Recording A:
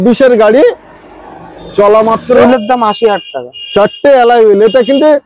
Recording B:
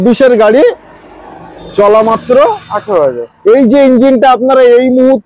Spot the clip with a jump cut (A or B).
A